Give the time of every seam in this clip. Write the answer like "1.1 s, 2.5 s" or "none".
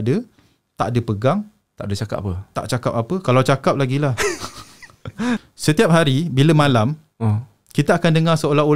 5.5 s